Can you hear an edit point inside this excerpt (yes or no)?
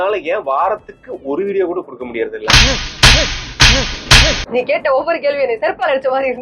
yes